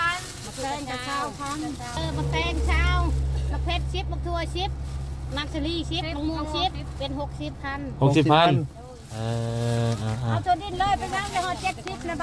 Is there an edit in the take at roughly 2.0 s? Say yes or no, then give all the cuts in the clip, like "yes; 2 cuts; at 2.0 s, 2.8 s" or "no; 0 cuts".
yes; 1 cut; at 2.0 s